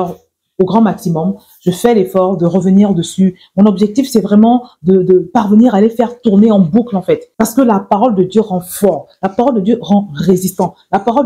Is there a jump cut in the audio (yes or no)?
yes